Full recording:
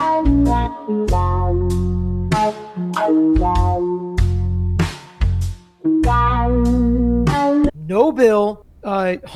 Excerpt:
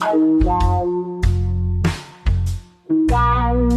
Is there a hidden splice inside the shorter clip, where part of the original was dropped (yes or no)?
no